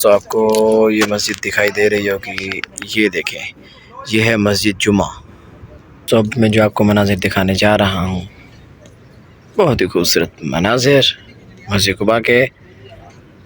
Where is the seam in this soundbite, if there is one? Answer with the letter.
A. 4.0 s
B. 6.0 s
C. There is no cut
B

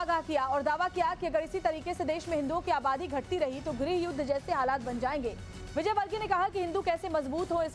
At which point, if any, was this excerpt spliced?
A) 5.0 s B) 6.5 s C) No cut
B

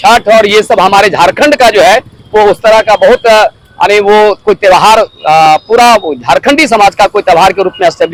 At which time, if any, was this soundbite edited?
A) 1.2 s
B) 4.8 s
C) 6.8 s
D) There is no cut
D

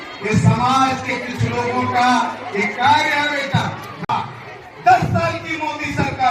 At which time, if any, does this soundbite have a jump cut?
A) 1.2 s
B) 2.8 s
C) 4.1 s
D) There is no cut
C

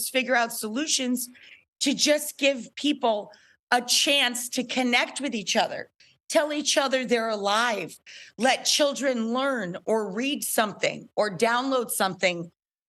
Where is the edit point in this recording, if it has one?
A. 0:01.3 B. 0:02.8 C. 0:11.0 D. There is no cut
D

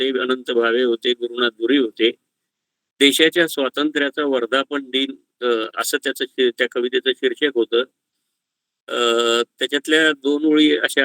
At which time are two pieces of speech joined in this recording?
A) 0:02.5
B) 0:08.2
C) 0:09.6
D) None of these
D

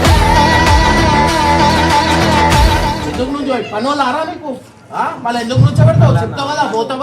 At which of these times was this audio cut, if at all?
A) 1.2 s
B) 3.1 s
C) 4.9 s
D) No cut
B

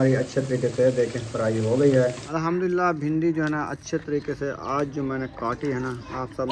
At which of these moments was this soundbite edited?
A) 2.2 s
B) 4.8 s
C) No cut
A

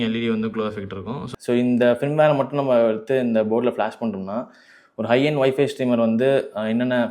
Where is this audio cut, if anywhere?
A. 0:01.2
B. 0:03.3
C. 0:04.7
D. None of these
A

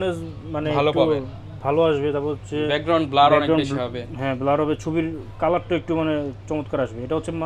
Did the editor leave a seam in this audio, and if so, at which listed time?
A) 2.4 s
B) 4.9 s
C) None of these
C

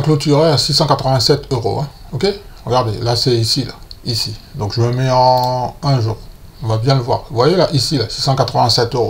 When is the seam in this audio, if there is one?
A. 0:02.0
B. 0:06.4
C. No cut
C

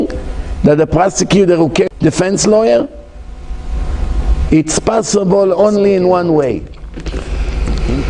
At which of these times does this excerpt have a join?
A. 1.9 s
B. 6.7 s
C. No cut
A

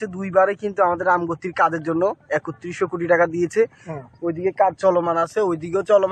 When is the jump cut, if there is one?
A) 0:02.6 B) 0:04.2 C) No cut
C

